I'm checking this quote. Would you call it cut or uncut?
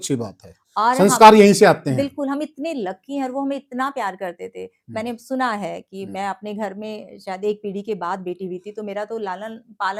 uncut